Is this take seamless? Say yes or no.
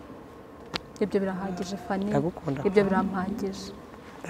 yes